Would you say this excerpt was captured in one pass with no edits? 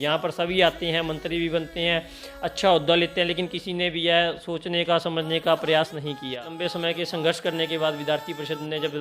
no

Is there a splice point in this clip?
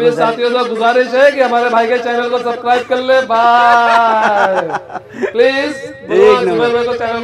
no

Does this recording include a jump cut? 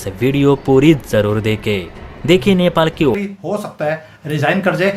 yes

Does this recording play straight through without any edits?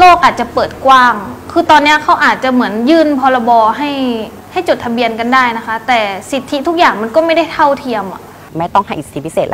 no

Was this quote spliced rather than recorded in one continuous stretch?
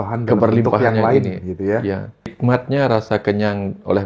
yes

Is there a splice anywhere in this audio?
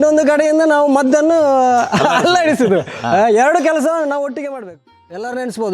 yes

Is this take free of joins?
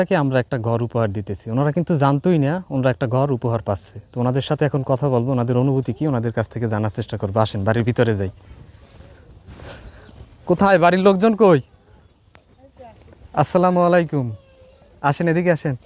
yes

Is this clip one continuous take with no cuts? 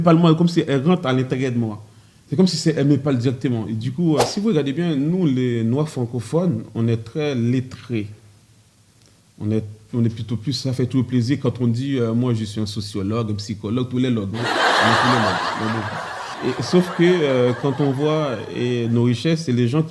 no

